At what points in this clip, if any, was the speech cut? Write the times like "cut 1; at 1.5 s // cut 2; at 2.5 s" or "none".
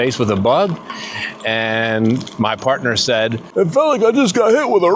cut 1; at 3.4 s